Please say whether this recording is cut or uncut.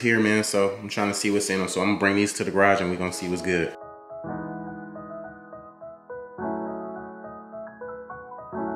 uncut